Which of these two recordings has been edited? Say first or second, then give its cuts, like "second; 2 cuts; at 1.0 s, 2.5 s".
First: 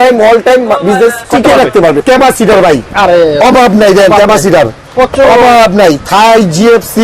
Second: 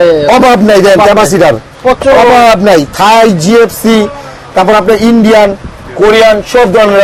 first; 2 cuts; at 1.2 s, 2.0 s